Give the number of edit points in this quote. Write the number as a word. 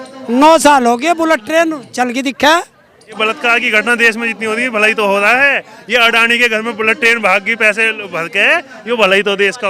one